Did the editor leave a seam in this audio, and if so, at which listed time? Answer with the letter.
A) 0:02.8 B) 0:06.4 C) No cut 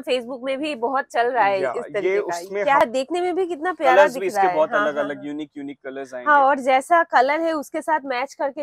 A